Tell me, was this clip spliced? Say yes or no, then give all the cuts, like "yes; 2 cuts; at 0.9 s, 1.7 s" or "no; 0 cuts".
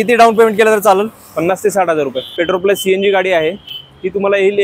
yes; 1 cut; at 2.2 s